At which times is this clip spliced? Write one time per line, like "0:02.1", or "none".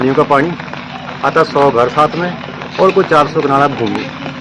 none